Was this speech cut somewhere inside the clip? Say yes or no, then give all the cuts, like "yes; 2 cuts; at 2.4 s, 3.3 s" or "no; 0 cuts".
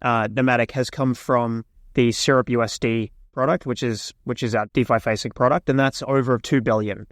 yes; 2 cuts; at 3.3 s, 4.7 s